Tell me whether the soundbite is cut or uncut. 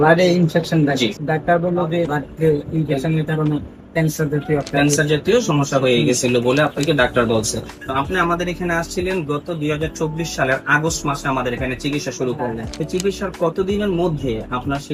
cut